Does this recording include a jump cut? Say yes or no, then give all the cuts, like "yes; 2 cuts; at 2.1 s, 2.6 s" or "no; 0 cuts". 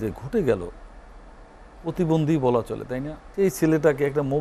yes; 1 cut; at 3.2 s